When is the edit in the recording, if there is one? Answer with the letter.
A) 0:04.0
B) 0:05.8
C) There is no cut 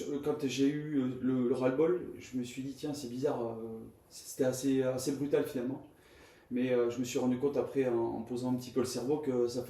C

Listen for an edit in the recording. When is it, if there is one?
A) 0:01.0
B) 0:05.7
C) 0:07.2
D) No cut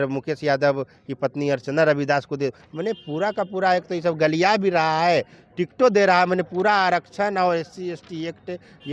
D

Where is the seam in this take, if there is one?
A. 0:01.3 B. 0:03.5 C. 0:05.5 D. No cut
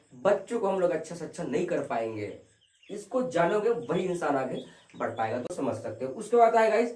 C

